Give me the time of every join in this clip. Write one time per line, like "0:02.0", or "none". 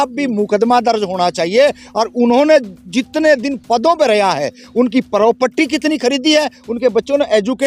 none